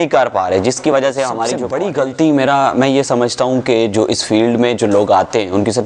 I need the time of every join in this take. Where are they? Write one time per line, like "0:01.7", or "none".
0:01.6